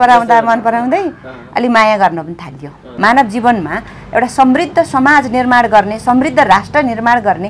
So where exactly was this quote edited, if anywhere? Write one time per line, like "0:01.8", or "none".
0:02.8